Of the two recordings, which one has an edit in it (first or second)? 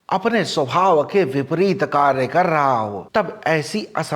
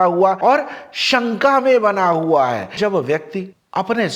second